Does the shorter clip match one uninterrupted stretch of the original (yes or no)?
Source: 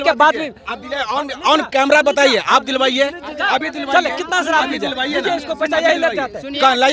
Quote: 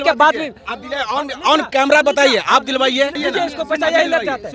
no